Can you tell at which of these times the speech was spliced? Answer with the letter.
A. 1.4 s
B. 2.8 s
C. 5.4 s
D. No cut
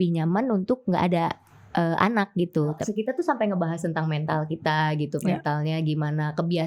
B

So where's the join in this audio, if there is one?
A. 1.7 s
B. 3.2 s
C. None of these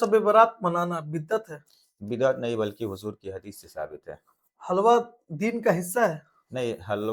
C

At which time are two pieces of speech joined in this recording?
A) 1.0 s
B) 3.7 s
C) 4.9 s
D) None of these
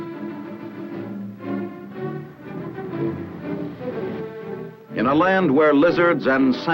C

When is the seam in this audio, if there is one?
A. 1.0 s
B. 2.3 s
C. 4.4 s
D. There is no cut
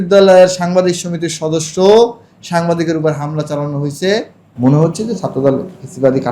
C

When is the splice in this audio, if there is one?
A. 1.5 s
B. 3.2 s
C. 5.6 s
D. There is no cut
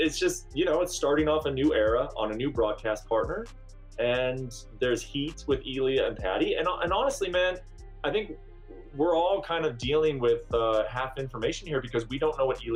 D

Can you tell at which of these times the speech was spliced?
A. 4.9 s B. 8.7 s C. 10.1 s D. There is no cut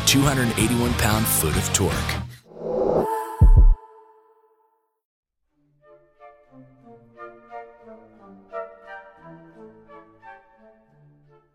A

